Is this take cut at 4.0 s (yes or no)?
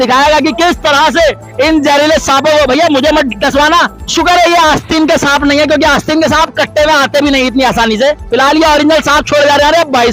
yes